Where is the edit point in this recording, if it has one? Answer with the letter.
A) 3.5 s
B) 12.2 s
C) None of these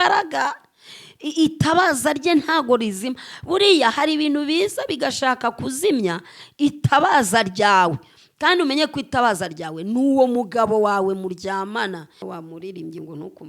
B